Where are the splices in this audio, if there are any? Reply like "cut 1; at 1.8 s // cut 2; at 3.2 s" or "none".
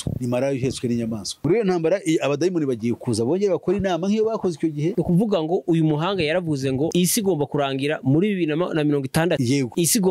cut 1; at 1.4 s // cut 2; at 4.9 s